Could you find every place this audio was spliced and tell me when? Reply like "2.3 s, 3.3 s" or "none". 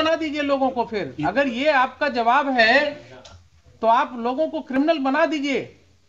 none